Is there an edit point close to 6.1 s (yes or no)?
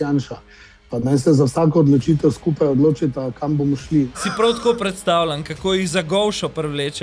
no